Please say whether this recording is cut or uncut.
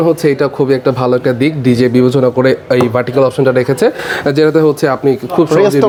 uncut